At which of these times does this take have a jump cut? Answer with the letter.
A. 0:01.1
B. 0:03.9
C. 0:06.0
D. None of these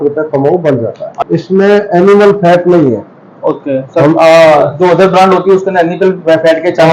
A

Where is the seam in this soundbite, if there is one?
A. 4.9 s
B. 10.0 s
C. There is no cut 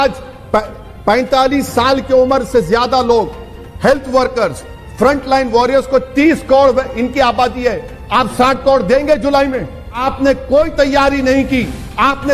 B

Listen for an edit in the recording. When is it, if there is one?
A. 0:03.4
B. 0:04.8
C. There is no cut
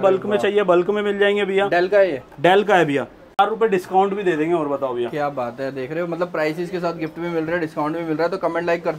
A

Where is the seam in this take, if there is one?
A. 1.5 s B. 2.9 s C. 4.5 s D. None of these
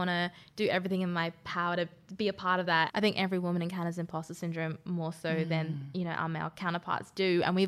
B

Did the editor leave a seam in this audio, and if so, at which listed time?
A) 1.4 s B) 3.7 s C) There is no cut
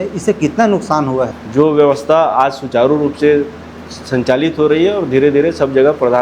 A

